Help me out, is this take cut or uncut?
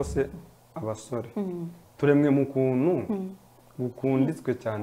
cut